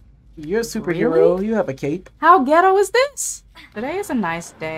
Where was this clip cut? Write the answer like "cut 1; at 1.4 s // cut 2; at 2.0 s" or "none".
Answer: cut 1; at 3.8 s